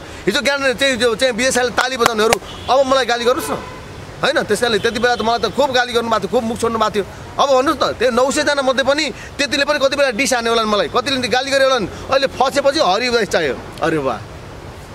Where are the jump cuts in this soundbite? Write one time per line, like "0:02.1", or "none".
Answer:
none

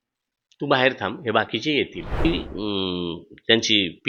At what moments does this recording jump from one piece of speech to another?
0:02.2

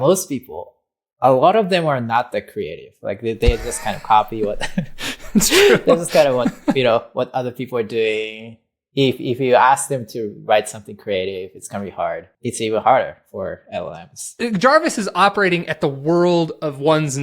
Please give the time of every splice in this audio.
0:12.3
0:14.3

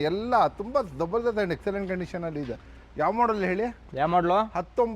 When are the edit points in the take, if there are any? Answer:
none

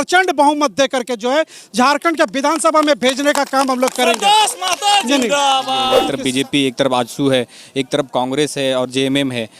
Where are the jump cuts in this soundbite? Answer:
0:06.1

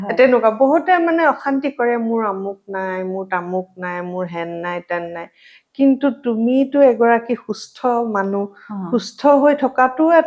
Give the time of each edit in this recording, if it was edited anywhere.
none

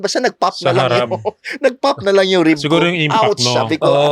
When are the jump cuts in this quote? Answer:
none

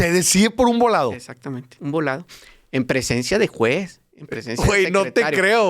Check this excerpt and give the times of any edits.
0:01.7

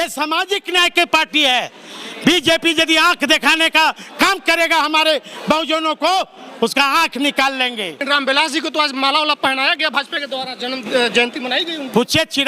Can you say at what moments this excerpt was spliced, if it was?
0:08.0

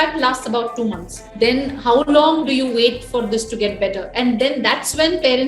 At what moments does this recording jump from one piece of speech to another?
0:01.2

